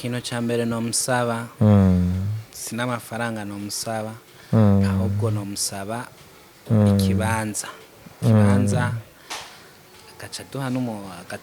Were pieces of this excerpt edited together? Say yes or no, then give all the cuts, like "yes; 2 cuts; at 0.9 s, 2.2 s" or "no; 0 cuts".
no; 0 cuts